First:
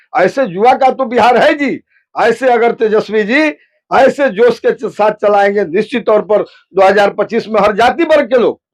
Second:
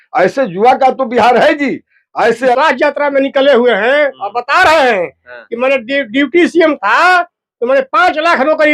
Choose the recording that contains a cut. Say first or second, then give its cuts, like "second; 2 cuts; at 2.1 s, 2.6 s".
second; 1 cut; at 2.6 s